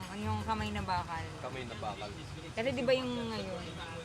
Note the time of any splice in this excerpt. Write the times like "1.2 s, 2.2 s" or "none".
none